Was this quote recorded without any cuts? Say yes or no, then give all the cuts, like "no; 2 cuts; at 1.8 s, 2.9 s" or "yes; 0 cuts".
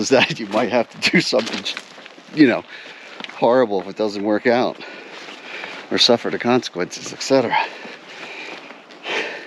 yes; 0 cuts